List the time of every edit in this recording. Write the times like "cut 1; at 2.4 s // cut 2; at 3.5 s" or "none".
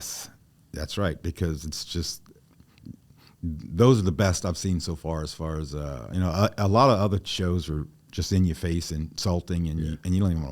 none